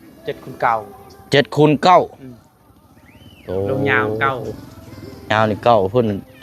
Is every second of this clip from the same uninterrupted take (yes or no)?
yes